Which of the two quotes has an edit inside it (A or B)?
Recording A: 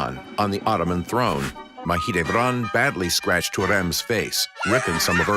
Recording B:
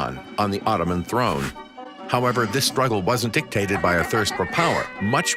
A